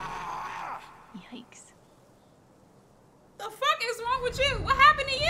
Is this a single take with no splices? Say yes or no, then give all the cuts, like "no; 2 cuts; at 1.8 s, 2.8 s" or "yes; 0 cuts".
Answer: yes; 0 cuts